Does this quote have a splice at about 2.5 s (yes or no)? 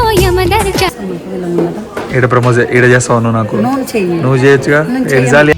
no